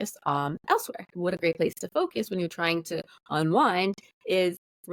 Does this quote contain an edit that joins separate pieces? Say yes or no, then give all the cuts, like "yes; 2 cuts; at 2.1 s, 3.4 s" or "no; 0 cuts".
yes; 1 cut; at 1.1 s